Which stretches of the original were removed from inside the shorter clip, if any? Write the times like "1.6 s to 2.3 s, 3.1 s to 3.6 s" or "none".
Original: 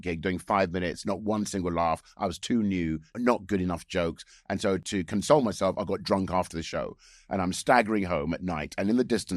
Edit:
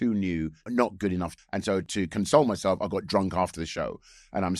3.8 s to 4.3 s